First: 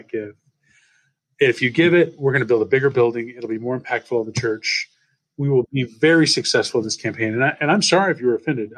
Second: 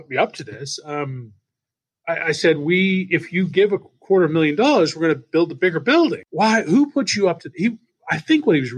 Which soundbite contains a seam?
second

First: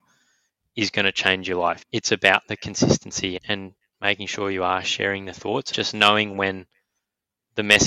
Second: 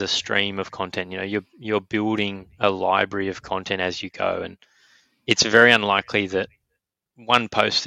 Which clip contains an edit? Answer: first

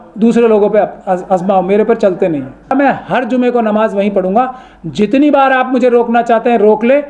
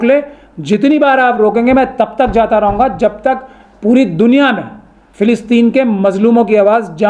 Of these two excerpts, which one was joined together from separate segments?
first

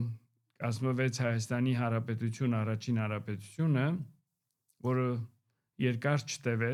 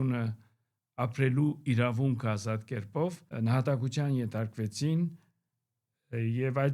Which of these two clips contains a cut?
second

